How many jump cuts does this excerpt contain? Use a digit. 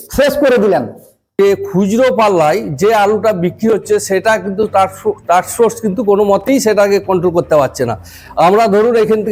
1